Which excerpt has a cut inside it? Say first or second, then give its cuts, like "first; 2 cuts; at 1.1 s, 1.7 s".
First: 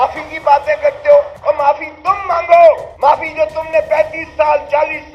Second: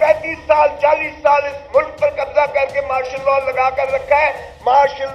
first; 2 cuts; at 1.3 s, 2.9 s